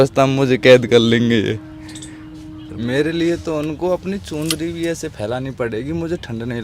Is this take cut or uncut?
cut